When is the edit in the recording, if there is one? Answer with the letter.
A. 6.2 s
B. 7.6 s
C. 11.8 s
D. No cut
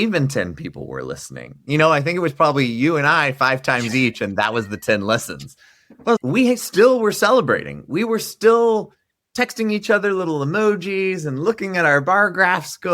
A